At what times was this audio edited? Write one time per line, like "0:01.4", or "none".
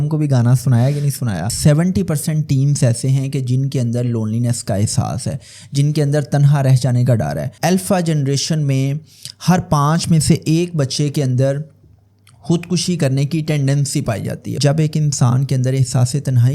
0:01.5
0:07.5
0:14.6